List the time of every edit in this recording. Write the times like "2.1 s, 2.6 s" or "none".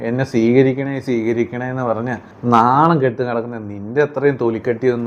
2.3 s